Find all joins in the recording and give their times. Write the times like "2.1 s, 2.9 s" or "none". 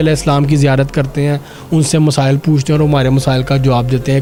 none